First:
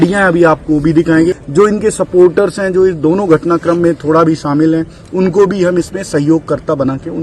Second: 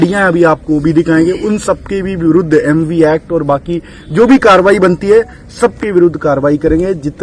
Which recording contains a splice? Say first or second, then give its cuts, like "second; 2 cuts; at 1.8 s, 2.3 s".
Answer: first; 1 cut; at 1.4 s